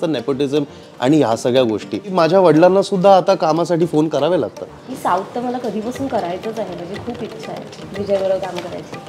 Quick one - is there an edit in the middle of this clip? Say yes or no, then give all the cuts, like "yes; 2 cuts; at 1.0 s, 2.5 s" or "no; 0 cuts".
yes; 2 cuts; at 2.1 s, 4.9 s